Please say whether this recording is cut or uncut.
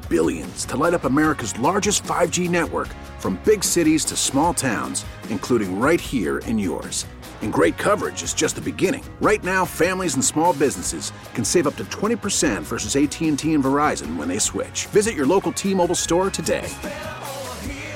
uncut